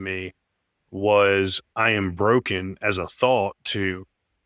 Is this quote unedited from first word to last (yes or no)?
no